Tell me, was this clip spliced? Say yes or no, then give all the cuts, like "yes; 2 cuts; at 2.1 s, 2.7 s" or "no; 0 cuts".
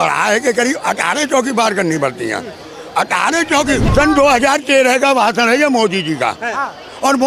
yes; 1 cut; at 3.8 s